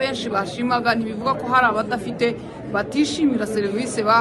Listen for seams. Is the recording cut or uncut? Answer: uncut